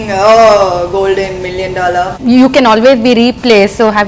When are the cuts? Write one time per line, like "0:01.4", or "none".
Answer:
0:02.1